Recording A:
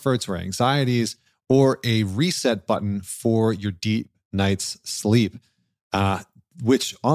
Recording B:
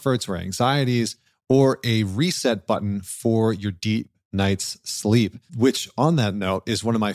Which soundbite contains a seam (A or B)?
B